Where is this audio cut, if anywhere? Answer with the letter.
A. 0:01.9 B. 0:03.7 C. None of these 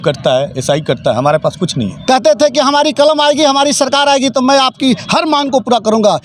A